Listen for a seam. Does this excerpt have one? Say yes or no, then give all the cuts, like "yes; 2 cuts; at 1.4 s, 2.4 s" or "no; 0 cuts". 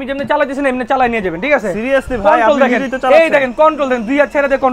no; 0 cuts